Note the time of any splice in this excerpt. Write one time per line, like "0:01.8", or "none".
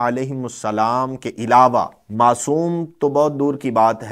0:02.0

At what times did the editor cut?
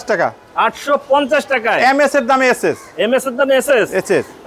none

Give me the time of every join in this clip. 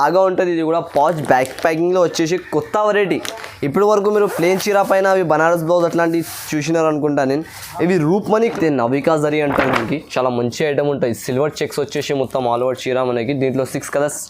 0:08.5

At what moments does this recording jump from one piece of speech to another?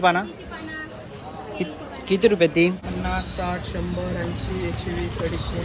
0:02.8

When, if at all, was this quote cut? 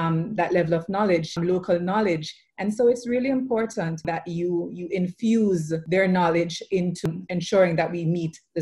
0:01.3
0:04.1
0:05.8
0:07.0

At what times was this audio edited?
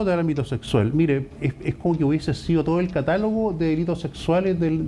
none

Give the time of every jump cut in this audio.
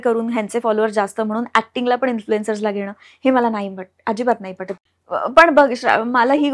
0:04.7

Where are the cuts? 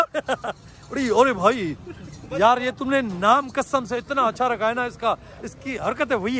none

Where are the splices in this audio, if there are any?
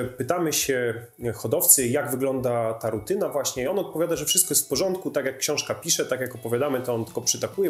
none

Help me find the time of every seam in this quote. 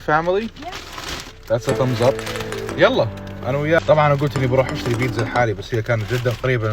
0:03.8

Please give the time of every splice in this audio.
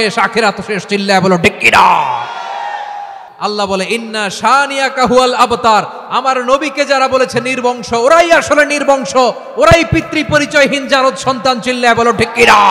0:03.2

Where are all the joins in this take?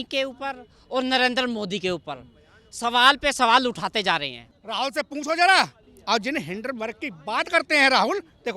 0:04.4

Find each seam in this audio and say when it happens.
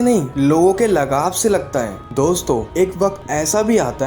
0:02.1

